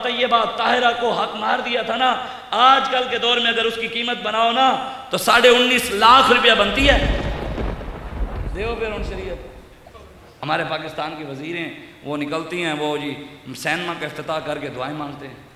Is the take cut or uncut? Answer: cut